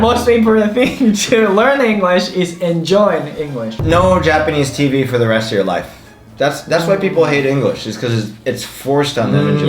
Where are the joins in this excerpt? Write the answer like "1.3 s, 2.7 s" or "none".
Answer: 3.8 s, 6.3 s